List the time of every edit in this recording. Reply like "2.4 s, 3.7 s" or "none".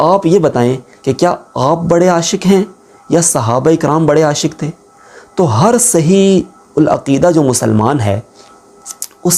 none